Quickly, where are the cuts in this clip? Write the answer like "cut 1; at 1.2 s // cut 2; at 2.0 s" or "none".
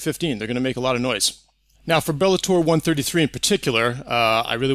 none